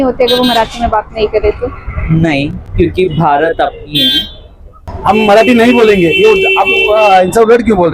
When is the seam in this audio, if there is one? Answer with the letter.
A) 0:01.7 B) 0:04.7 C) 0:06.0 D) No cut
B